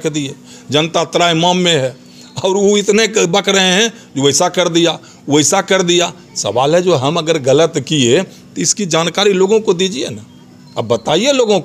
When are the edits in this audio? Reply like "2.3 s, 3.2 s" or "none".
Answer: none